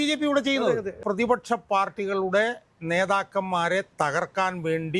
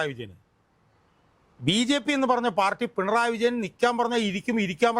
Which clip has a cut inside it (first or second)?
first